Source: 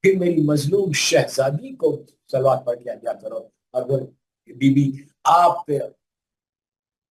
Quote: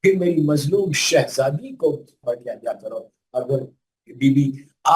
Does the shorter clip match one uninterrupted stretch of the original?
no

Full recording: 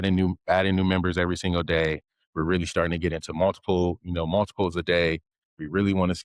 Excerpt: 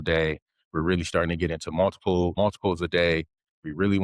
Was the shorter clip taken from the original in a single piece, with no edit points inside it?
no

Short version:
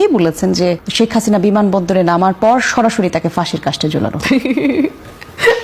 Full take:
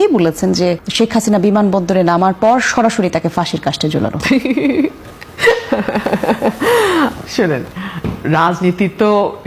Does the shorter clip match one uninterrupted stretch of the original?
yes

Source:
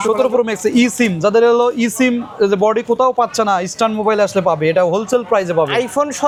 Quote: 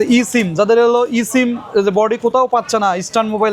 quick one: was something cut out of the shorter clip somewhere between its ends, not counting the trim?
no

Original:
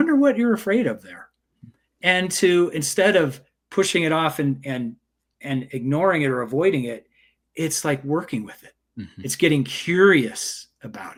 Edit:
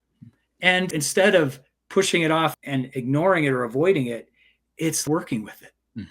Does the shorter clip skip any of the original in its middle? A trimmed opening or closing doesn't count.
yes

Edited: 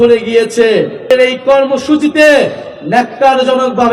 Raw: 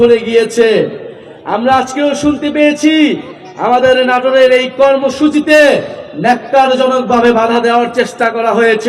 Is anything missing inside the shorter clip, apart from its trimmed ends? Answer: yes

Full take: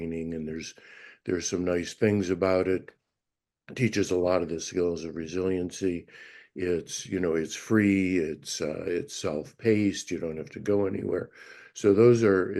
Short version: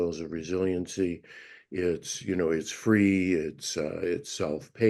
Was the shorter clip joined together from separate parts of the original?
no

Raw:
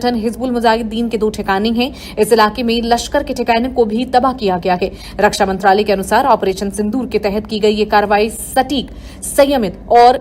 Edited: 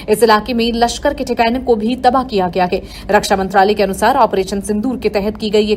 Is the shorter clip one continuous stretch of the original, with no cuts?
yes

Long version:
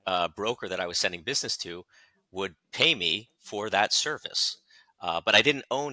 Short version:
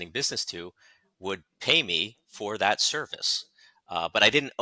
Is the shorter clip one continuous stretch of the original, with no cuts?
yes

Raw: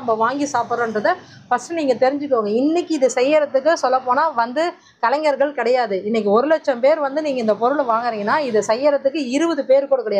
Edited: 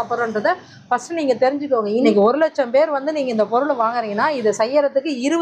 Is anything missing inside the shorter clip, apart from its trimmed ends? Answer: yes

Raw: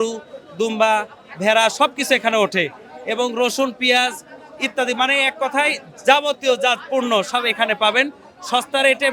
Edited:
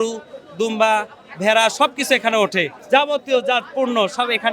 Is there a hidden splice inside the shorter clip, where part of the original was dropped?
yes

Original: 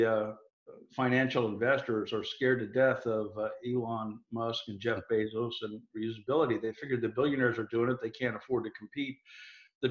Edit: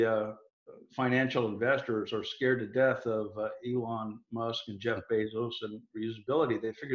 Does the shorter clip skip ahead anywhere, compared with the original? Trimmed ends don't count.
no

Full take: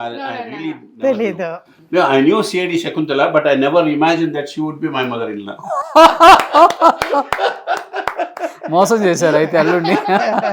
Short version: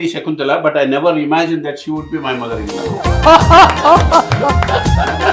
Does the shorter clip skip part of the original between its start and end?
no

